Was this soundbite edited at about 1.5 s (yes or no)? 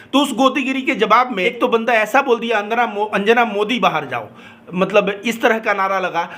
yes